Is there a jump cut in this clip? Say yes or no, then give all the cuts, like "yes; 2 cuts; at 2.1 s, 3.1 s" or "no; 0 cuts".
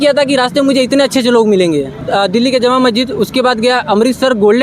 yes; 1 cut; at 2.0 s